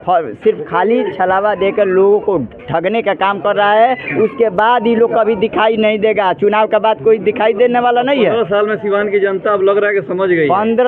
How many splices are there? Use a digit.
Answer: 0